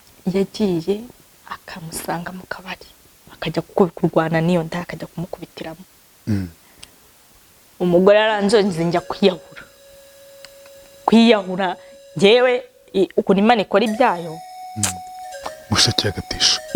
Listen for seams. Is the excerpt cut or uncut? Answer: uncut